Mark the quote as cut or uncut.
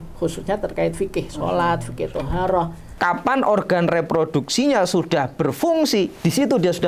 cut